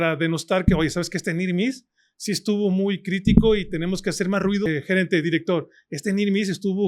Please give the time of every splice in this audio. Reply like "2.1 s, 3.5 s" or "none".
4.7 s